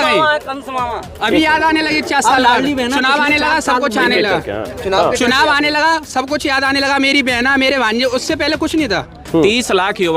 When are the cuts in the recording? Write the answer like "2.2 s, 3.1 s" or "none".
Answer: 9.2 s